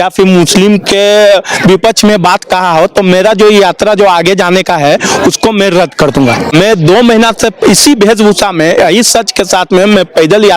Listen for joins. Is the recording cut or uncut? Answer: cut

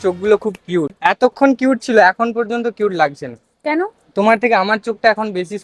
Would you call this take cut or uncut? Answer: cut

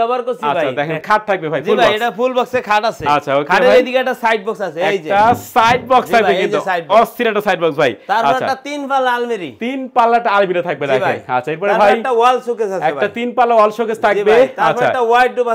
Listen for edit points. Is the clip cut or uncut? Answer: cut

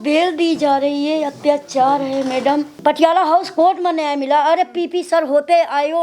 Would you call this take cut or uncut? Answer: cut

